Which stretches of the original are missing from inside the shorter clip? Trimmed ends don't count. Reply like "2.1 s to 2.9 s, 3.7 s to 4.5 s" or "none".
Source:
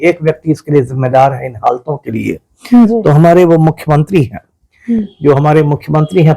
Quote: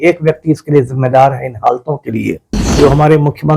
2.6 s to 5.1 s